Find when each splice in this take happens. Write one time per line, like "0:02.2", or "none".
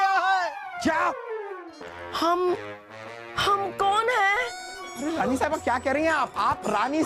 0:01.3
0:04.8